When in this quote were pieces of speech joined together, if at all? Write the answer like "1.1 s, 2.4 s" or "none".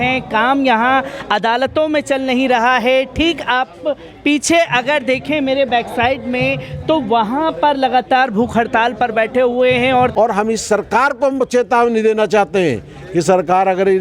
10.1 s